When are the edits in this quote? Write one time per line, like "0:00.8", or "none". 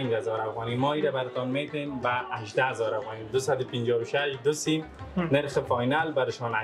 none